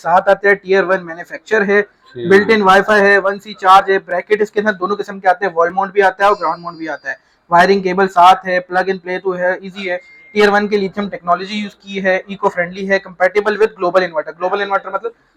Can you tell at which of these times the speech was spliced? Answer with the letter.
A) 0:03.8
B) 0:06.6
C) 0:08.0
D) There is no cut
D